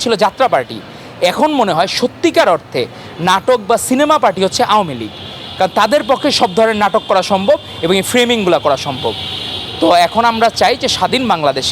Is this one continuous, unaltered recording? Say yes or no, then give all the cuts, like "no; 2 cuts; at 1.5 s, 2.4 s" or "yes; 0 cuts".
yes; 0 cuts